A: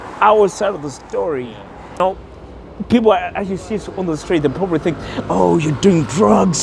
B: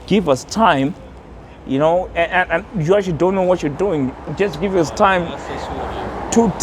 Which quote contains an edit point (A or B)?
A